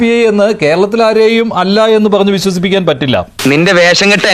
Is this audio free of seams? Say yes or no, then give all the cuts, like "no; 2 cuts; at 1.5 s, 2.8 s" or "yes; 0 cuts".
yes; 0 cuts